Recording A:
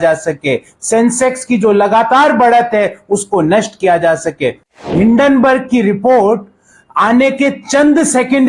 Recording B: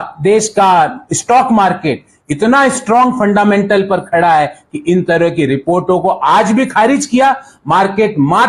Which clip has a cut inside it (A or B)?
A